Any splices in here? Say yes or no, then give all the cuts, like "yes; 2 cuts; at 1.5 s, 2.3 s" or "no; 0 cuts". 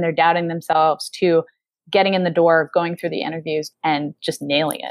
yes; 1 cut; at 3.7 s